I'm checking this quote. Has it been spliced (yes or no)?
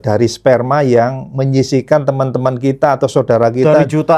no